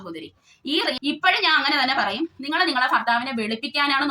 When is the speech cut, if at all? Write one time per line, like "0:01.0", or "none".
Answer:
0:01.0